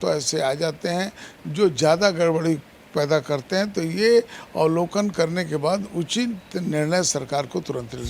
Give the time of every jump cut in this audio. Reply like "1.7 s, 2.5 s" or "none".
none